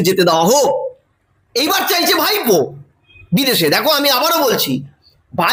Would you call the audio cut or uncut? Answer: uncut